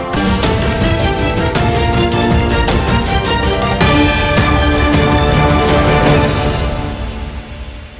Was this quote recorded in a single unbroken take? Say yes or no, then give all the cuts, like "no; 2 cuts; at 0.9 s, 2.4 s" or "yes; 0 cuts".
yes; 0 cuts